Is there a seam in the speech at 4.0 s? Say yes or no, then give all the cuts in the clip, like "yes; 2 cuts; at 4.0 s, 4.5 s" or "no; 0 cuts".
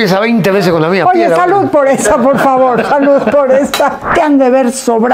yes; 1 cut; at 4.0 s